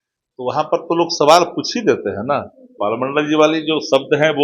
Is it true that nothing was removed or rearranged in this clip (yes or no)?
no